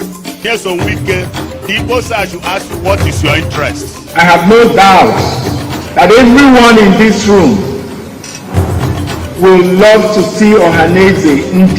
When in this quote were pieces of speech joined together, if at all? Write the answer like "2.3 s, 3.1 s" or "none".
0.9 s

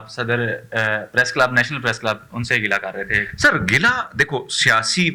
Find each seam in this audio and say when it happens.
none

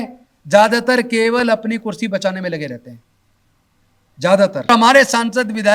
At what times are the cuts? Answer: 4.7 s

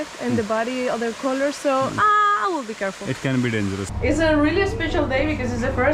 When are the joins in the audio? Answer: 3.8 s

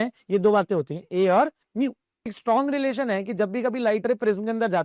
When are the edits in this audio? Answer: 2.4 s

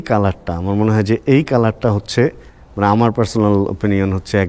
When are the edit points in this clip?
none

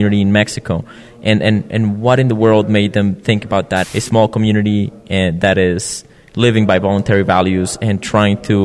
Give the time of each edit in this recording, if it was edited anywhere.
3.8 s

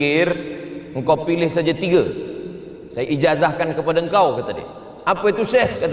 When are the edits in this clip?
none

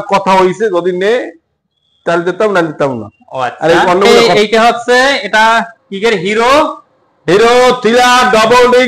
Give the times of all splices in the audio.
4.1 s

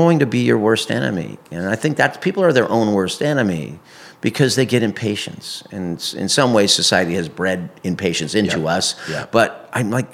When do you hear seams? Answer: none

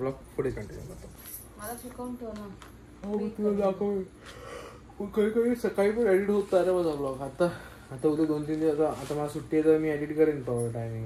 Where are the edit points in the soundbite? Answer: 1.1 s

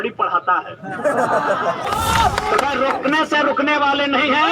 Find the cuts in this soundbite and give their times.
1.8 s

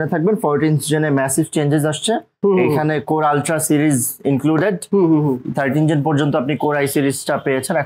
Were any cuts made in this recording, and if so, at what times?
none

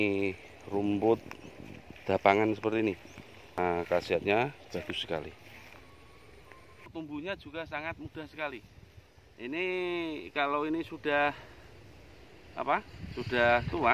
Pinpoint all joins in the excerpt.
3.6 s, 6.9 s

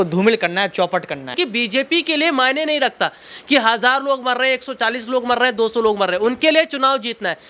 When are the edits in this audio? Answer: 1.3 s

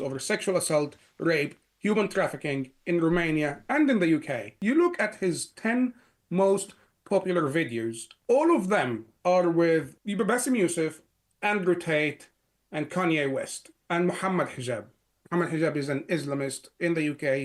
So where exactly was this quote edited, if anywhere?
4.5 s, 8.1 s, 10.0 s

